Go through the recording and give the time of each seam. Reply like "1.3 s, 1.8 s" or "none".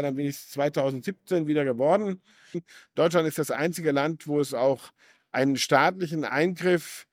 2.7 s